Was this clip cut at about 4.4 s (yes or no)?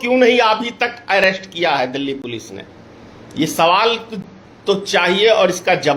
no